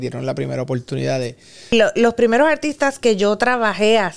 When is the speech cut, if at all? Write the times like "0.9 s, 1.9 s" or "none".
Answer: 1.7 s